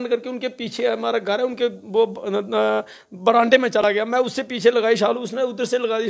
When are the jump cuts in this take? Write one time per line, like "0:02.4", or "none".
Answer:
none